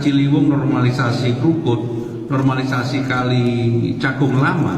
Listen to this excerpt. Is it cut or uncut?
uncut